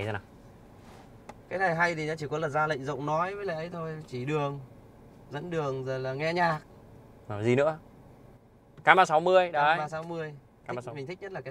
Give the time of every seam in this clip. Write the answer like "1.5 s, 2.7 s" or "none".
none